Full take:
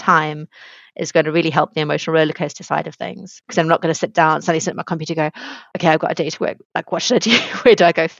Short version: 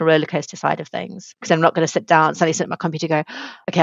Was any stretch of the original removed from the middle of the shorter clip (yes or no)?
no